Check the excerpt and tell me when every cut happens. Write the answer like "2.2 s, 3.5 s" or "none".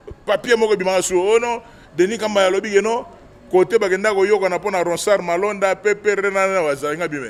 none